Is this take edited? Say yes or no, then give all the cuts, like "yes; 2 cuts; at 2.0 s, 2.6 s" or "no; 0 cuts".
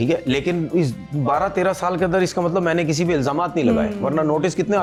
no; 0 cuts